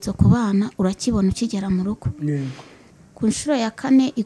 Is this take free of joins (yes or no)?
no